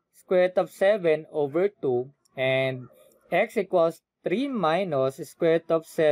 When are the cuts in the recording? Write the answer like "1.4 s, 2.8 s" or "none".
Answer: none